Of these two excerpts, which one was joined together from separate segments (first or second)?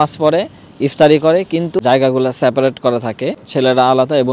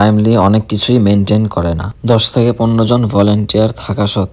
first